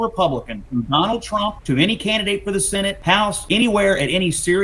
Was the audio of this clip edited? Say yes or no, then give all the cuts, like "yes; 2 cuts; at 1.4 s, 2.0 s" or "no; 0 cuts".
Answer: yes; 2 cuts; at 1.6 s, 3.2 s